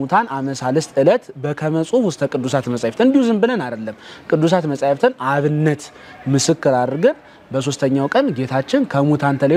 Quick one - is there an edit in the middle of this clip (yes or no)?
no